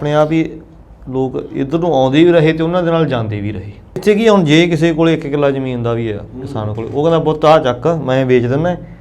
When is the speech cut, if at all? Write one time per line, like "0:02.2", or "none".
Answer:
0:04.0